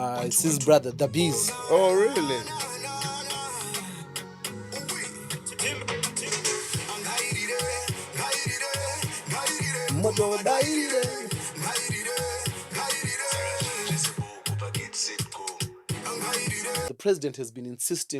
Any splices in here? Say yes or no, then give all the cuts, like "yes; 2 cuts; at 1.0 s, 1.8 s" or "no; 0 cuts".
yes; 1 cut; at 16.9 s